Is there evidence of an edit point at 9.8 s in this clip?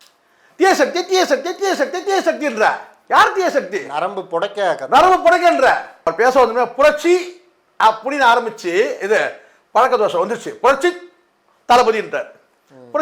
no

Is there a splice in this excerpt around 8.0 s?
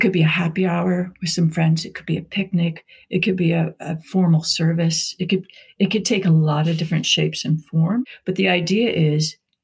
yes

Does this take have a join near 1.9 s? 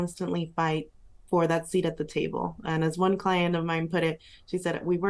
no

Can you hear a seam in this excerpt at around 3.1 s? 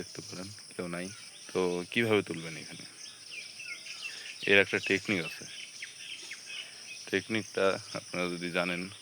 no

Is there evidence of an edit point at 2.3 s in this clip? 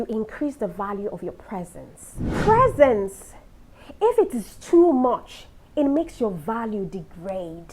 yes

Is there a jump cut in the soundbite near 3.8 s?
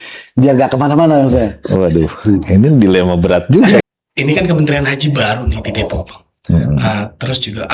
yes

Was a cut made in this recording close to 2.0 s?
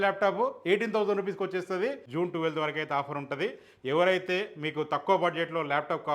yes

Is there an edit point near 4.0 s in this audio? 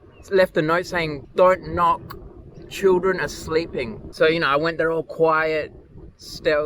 yes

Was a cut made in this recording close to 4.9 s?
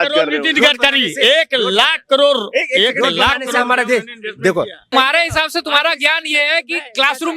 yes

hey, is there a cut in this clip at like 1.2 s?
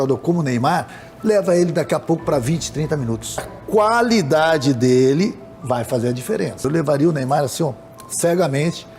no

